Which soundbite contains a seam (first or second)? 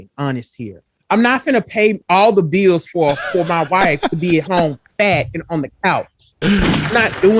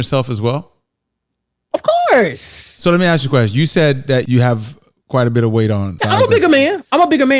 second